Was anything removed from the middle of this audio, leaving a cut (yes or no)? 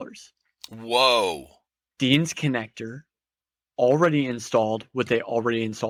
no